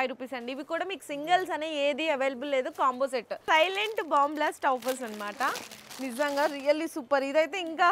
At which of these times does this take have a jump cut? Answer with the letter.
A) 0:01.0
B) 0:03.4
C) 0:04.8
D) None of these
B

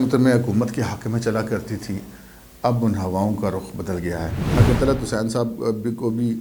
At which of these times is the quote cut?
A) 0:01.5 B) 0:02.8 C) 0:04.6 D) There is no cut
C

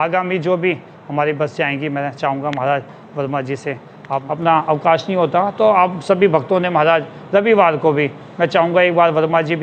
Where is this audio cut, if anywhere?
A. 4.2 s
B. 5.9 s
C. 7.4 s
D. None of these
A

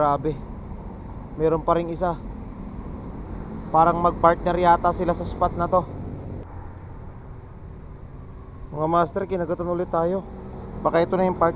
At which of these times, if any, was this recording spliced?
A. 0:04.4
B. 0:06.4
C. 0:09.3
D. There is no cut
B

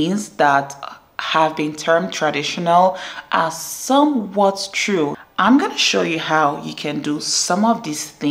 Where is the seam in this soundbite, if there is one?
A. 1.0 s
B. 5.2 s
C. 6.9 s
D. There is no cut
B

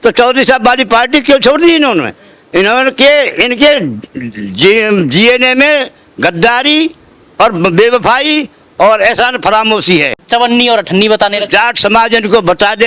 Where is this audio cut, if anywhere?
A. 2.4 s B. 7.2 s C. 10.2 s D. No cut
C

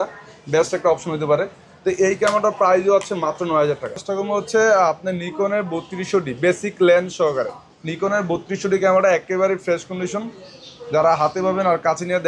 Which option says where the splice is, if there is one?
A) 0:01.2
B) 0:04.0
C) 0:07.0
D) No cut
B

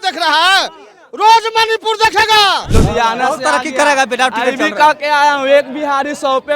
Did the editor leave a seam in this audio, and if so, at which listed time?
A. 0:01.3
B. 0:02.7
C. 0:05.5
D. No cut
B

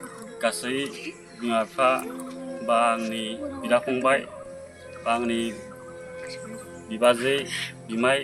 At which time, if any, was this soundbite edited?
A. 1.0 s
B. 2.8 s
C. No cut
C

